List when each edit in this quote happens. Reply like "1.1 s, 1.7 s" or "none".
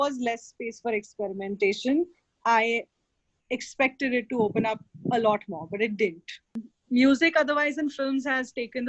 none